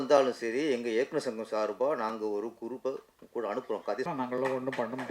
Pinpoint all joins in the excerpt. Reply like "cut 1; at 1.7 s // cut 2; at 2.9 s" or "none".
cut 1; at 4.1 s